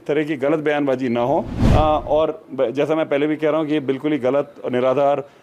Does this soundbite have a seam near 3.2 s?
no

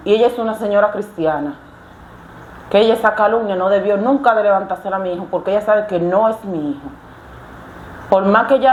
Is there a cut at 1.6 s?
no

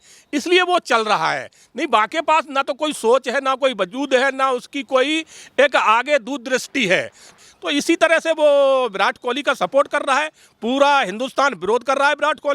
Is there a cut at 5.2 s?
no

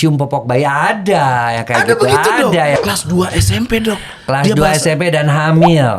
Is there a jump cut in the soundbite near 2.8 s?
yes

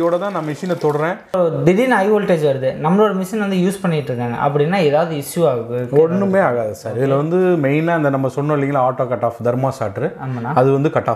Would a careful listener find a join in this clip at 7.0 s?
no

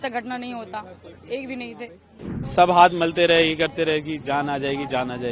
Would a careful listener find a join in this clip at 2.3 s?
yes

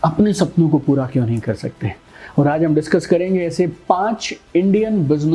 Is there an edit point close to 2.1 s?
no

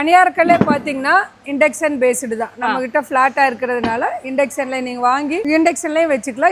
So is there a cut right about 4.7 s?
no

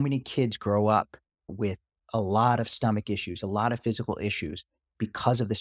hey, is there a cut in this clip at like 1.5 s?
yes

